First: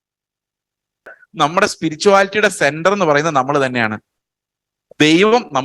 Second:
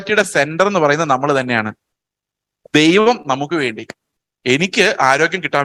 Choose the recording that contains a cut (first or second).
first